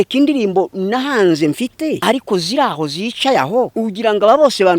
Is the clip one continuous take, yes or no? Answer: no